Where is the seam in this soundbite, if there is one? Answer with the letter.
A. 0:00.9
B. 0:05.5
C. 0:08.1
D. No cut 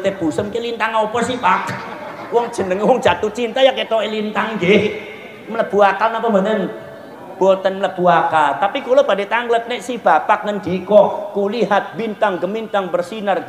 D